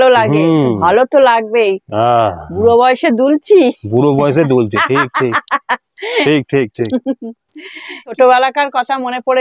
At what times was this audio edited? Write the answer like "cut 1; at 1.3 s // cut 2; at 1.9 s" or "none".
cut 1; at 8.1 s